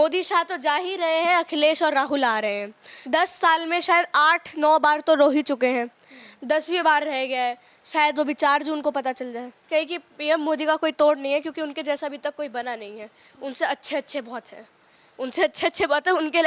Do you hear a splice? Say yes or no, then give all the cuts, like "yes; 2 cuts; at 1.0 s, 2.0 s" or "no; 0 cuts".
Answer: yes; 2 cuts; at 2.9 s, 9.6 s